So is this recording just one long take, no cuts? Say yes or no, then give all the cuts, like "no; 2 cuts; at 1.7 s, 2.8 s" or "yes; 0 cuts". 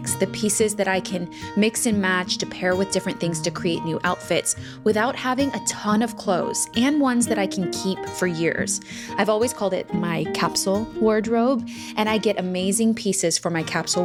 yes; 0 cuts